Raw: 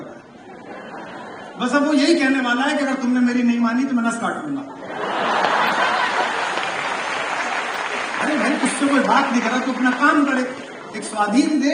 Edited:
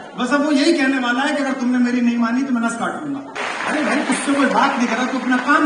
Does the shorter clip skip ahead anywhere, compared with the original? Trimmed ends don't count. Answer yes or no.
yes